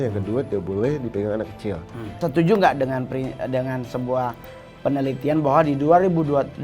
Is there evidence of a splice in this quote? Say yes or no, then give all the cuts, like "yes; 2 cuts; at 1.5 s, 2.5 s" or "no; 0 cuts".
yes; 1 cut; at 2.1 s